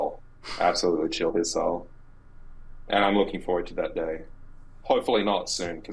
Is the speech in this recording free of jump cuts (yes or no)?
yes